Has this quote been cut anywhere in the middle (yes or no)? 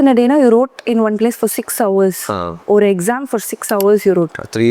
no